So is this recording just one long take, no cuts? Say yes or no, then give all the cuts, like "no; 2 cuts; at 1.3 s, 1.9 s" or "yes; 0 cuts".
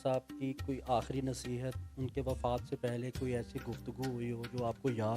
yes; 0 cuts